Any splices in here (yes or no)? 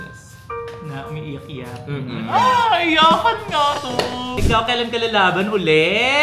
yes